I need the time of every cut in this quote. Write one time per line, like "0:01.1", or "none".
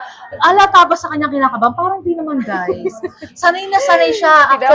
none